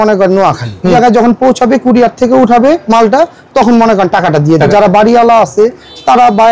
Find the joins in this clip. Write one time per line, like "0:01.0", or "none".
0:00.9
0:04.7